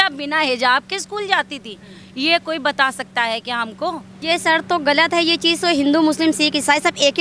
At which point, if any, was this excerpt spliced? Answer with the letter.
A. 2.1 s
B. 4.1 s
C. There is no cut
B